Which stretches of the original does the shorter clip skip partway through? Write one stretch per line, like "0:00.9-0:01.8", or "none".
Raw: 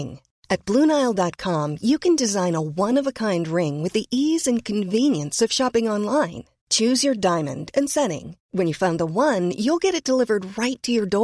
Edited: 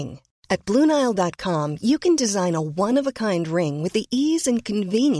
none